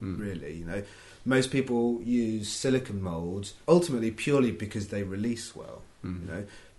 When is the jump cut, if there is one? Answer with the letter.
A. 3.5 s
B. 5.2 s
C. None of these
A